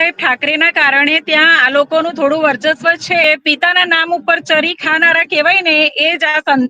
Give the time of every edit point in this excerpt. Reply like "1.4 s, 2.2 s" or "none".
3.2 s